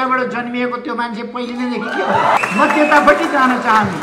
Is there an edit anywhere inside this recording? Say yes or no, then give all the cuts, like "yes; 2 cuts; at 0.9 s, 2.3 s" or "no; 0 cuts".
no; 0 cuts